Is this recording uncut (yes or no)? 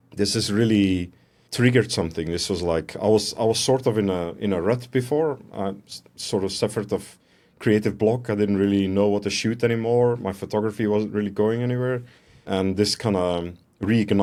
yes